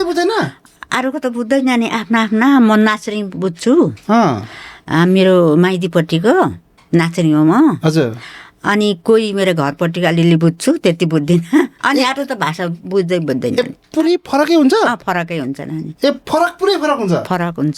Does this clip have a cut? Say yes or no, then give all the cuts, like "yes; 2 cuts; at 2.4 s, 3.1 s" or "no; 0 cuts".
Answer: yes; 2 cuts; at 11.8 s, 15.8 s